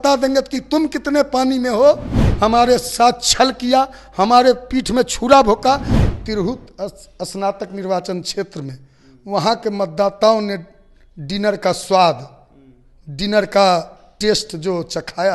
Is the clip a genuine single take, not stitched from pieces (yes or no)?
no